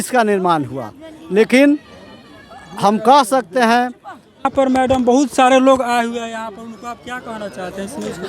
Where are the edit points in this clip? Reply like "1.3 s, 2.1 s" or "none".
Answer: 4.5 s